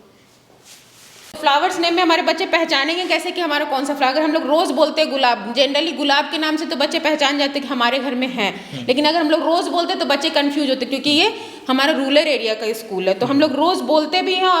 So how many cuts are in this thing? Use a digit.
1